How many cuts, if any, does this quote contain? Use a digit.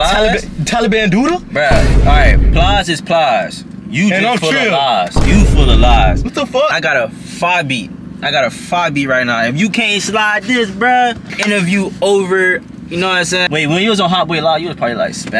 0